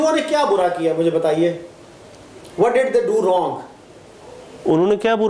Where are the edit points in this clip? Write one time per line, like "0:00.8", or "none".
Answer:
none